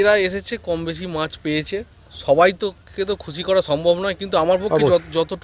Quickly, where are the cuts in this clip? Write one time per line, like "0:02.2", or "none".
none